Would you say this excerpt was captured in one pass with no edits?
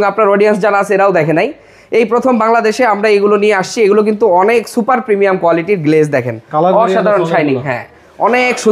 yes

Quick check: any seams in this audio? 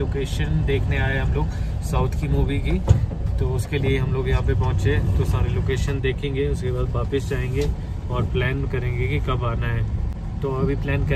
no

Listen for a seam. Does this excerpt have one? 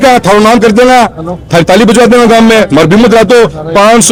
no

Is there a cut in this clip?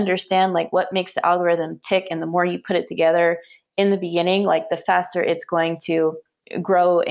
no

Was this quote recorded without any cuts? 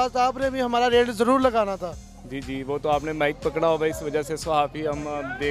no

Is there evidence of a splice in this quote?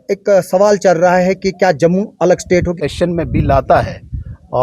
yes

